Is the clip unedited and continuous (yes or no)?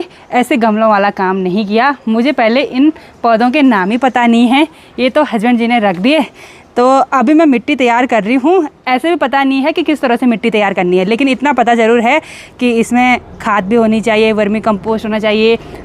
yes